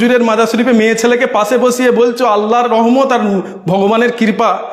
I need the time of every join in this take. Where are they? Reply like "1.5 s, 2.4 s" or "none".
none